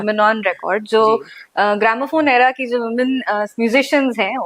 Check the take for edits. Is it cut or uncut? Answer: uncut